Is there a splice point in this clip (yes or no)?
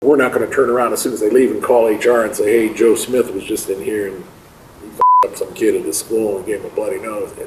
no